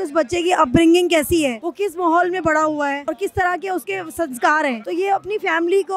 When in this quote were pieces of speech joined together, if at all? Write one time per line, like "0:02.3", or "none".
0:01.6
0:03.0
0:04.8